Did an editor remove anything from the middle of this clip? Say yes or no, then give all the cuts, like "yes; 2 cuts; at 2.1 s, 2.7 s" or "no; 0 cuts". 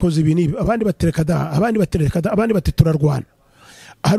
no; 0 cuts